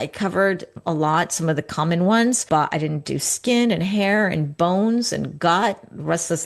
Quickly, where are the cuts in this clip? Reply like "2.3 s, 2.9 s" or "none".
2.4 s